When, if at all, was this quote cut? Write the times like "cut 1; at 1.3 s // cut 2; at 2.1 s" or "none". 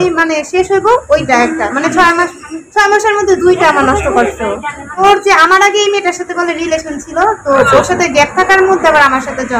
cut 1; at 5.0 s